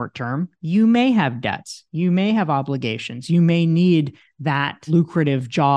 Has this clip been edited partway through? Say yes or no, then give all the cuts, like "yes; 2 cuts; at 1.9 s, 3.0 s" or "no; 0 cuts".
yes; 1 cut; at 4.7 s